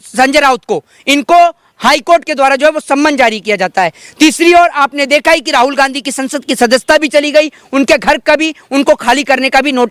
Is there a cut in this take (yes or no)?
no